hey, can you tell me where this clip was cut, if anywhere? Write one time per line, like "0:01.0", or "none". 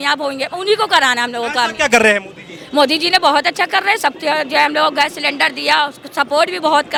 none